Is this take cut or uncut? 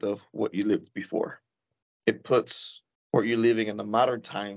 cut